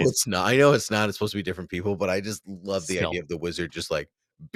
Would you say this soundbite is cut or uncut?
uncut